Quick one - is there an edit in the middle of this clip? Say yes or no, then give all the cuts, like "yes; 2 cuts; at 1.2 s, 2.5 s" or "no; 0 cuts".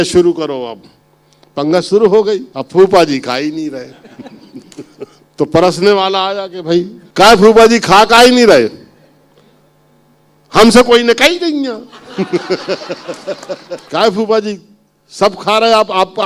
yes; 4 cuts; at 2.5 s, 5.2 s, 7.0 s, 13.8 s